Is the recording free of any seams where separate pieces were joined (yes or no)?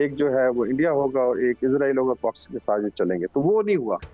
yes